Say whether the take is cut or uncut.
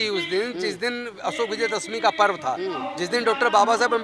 uncut